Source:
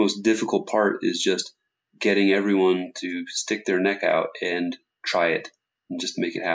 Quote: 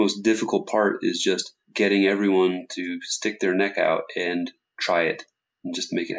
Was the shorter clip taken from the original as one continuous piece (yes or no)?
no